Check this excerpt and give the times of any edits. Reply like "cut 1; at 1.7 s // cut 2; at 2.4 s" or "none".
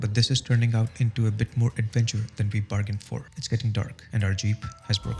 cut 1; at 3.3 s // cut 2; at 4.0 s